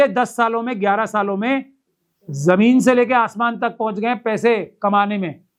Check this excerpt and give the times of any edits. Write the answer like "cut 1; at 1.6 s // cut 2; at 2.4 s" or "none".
none